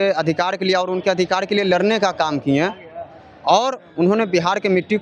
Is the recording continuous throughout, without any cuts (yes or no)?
yes